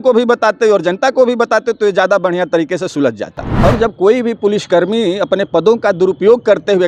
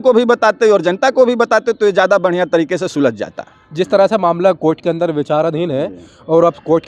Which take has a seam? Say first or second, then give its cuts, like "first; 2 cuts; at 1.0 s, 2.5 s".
first; 1 cut; at 3.4 s